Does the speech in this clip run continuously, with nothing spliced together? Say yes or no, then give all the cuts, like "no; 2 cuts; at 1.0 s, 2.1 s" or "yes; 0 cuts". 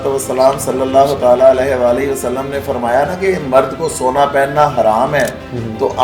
yes; 0 cuts